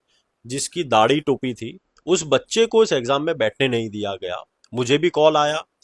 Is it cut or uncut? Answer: uncut